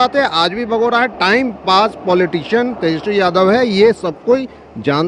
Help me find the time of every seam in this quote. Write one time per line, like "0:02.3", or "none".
none